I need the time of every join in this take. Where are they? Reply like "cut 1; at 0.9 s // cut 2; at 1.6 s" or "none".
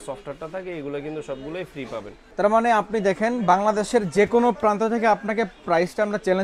cut 1; at 2.2 s